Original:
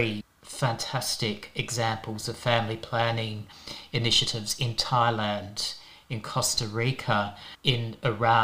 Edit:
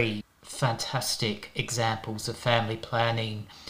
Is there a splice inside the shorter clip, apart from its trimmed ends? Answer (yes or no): no